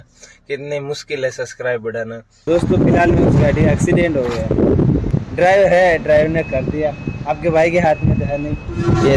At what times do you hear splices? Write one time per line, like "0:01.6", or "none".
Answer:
0:02.4
0:05.1